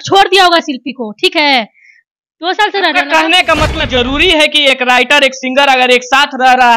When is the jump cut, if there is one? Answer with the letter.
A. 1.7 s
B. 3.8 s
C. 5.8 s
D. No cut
B